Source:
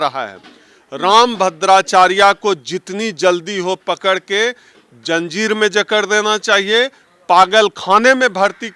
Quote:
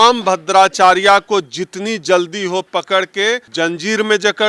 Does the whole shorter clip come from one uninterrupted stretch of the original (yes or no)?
no